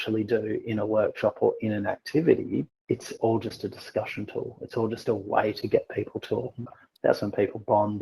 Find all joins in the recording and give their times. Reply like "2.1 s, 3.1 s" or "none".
2.7 s, 6.8 s